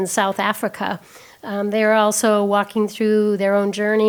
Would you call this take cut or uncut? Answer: uncut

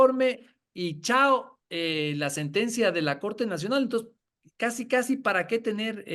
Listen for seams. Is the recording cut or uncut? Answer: uncut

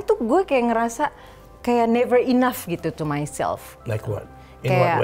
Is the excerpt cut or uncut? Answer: uncut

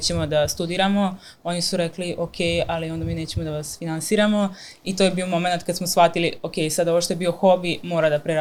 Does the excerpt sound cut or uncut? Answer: uncut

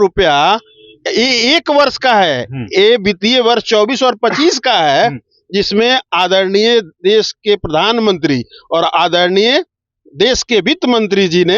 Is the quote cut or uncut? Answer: uncut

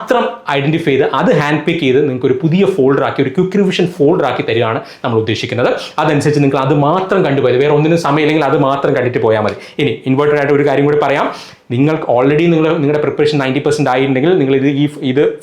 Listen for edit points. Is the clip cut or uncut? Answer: uncut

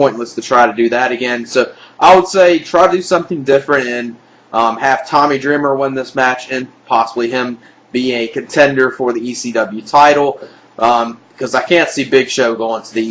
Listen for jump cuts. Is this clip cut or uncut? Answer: cut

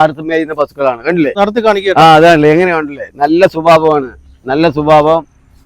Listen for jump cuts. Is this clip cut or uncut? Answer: cut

